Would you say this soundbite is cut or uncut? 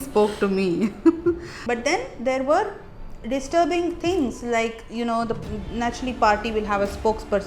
cut